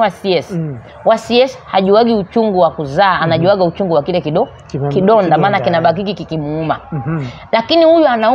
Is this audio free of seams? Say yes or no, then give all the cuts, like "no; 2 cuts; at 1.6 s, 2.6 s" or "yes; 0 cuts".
yes; 0 cuts